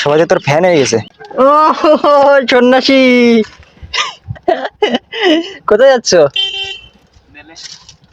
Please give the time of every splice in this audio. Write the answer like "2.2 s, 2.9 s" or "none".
1.2 s